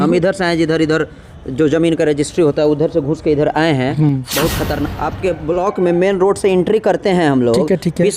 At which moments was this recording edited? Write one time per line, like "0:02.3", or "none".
0:04.9